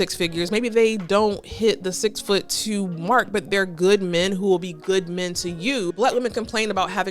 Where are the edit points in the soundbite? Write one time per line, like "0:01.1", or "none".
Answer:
0:05.9